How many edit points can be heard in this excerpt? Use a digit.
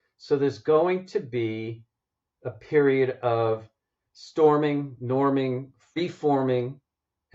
1